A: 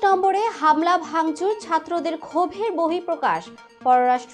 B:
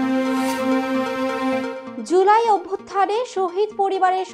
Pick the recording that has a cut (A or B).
B